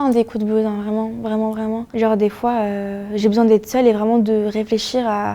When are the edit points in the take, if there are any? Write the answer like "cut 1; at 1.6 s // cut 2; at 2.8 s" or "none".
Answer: cut 1; at 1.9 s